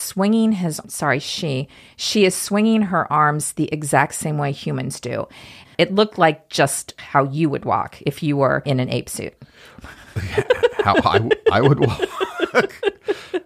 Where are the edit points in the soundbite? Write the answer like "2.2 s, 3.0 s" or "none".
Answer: 5.7 s, 6.9 s, 8.6 s